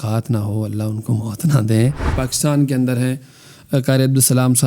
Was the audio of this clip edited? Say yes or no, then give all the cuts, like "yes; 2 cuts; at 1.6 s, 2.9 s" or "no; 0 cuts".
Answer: yes; 1 cut; at 2.1 s